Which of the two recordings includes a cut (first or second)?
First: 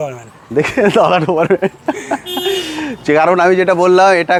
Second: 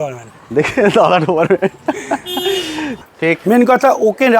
second